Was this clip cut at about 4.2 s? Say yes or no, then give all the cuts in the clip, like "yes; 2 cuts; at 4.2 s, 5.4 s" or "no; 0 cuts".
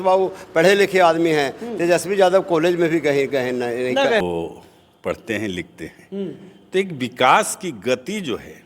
yes; 1 cut; at 4.2 s